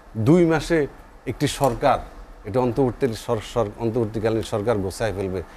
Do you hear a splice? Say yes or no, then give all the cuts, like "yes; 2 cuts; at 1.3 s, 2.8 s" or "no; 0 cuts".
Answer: no; 0 cuts